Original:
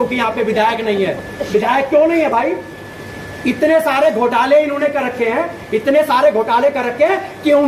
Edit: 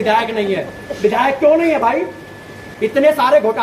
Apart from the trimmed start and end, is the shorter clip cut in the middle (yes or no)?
yes